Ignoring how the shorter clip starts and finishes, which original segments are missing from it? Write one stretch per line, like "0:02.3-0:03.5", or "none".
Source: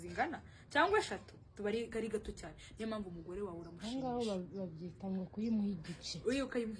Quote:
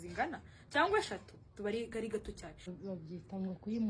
0:02.7-0:04.4